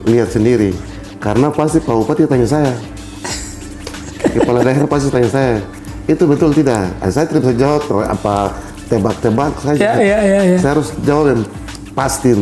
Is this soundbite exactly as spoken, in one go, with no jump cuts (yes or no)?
yes